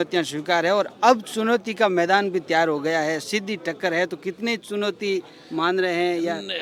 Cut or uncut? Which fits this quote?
uncut